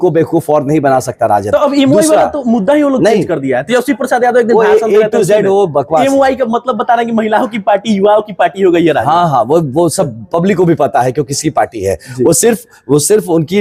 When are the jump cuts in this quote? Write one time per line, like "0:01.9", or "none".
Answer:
none